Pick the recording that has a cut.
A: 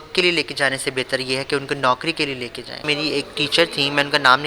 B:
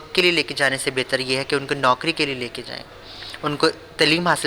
A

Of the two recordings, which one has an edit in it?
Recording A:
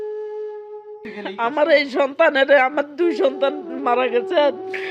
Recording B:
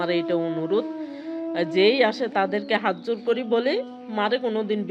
A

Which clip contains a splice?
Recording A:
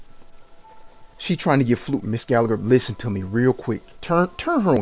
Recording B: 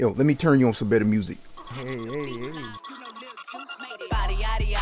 B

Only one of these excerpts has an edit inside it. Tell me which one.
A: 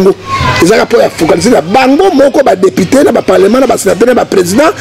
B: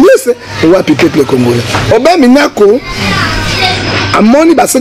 B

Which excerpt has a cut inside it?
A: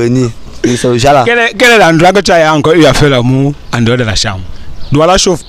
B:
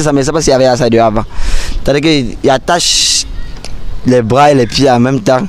A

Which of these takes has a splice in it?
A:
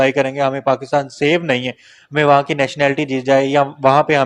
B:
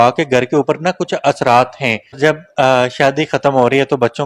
B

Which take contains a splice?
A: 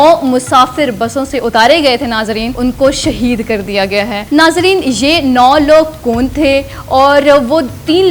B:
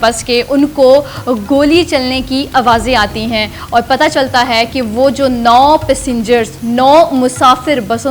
A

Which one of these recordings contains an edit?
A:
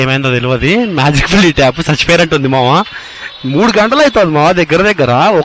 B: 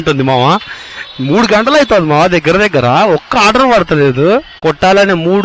B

